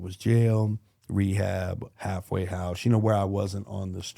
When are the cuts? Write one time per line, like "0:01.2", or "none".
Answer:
0:01.9